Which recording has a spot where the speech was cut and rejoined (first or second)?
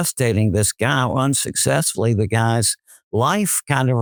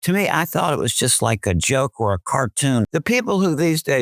second